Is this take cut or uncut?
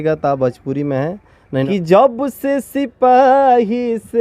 cut